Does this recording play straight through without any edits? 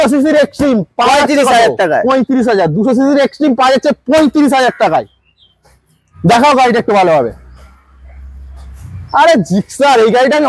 yes; 0 cuts

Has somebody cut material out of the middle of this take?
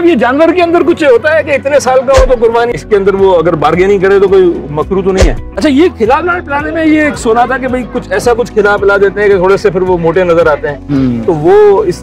yes; 2 cuts; at 2.7 s, 5.5 s

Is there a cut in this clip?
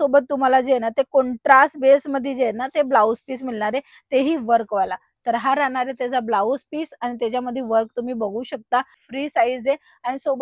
yes; 1 cut; at 9.0 s

